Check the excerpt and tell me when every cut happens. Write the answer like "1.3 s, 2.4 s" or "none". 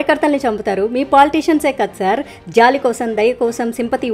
none